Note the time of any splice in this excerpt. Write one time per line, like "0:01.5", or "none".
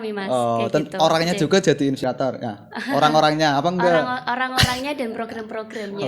0:02.0